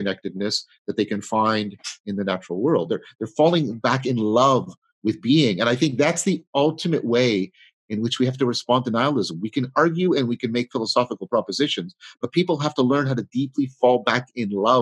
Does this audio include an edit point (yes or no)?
no